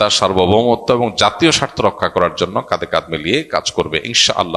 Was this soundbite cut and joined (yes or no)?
no